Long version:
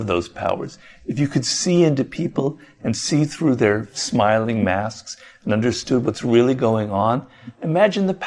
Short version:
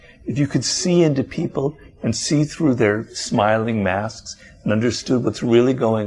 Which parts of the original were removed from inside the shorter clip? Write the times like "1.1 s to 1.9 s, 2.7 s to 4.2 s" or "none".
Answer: none